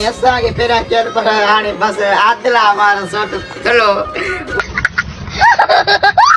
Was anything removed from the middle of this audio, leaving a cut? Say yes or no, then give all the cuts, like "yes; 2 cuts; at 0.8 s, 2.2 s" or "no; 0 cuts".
yes; 1 cut; at 4.6 s